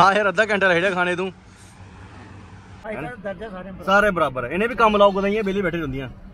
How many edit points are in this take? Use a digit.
1